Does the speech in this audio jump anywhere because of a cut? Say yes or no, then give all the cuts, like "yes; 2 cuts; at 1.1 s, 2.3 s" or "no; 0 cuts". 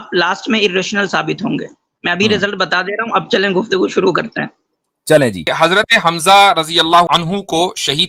yes; 2 cuts; at 5.5 s, 7.1 s